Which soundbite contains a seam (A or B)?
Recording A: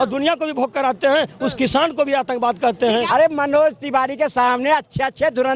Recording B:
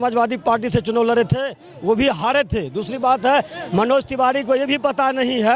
A